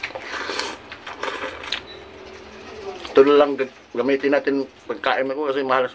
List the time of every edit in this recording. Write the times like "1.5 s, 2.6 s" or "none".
1.7 s